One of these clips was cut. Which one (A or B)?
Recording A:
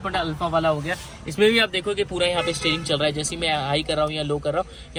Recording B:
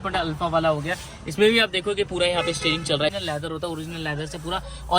B